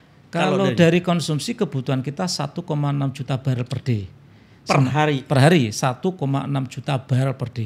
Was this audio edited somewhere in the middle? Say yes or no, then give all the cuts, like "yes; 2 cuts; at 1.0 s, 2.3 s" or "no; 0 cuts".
no; 0 cuts